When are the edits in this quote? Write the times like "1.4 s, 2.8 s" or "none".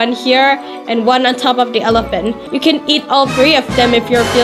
none